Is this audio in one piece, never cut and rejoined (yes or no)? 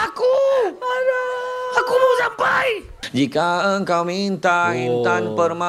no